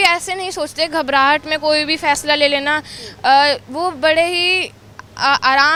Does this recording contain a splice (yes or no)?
no